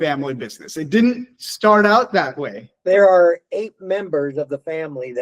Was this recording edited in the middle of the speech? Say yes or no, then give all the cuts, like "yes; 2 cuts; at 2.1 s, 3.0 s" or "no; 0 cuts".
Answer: yes; 1 cut; at 2.7 s